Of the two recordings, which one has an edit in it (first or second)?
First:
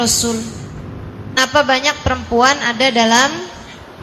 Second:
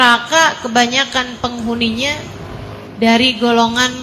first